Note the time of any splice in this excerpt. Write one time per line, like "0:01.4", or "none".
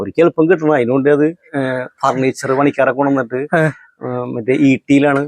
0:01.5